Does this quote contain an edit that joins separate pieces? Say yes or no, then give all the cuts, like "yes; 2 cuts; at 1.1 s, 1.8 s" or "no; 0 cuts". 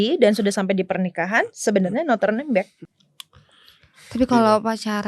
yes; 1 cut; at 2.8 s